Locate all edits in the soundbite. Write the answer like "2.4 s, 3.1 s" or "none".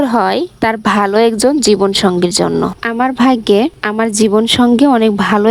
none